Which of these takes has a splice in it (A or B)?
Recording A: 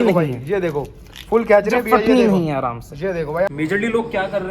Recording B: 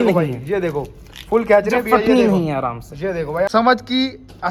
A